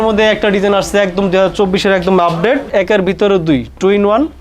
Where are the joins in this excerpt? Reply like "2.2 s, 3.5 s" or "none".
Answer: 2.7 s